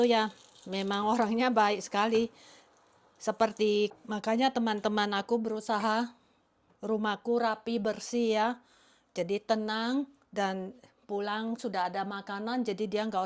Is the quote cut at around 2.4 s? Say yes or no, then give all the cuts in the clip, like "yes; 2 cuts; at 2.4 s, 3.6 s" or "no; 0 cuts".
no; 1 cut; at 3.9 s